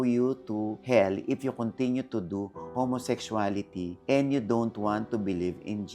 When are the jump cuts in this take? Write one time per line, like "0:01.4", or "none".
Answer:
none